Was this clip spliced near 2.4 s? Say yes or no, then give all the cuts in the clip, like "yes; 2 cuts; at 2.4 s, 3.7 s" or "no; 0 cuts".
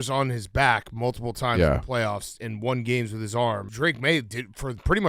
no; 1 cut; at 3.7 s